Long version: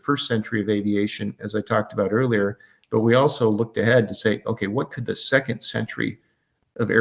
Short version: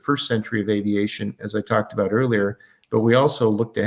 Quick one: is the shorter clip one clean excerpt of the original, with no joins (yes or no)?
yes